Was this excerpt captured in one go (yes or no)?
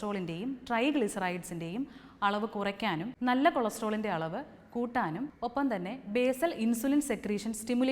no